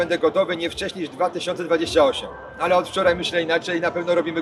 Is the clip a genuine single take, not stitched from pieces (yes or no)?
yes